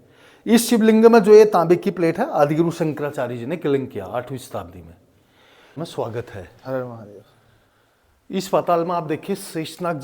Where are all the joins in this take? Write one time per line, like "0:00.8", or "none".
0:05.8